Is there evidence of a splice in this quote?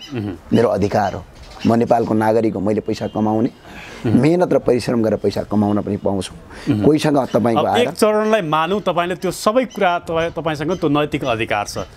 no; 0 cuts

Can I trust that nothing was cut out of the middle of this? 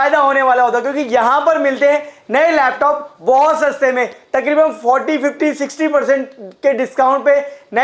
yes; 0 cuts

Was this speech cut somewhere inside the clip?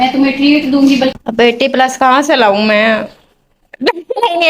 yes; 1 cut; at 1.1 s

